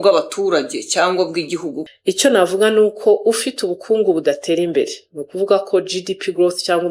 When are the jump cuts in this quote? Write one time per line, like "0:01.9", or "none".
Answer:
0:01.7